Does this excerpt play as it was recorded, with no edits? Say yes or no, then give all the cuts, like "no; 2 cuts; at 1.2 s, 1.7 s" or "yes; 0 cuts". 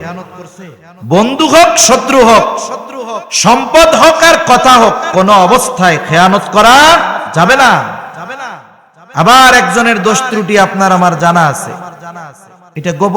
yes; 0 cuts